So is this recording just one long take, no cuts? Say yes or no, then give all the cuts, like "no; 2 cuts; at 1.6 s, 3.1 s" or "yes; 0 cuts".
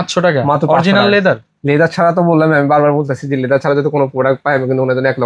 yes; 0 cuts